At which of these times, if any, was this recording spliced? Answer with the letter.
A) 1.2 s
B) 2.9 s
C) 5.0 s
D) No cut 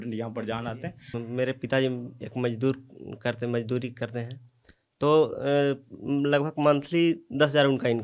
A